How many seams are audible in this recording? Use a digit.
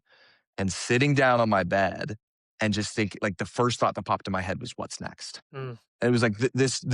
1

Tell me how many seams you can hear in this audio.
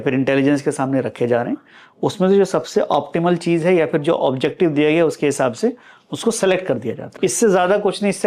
1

